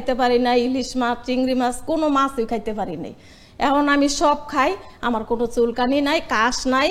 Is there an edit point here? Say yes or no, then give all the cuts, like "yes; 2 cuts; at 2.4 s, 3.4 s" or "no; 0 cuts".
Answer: no; 0 cuts